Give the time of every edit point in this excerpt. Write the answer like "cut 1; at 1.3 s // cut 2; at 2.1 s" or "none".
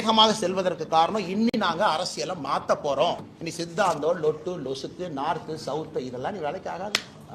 cut 1; at 3.4 s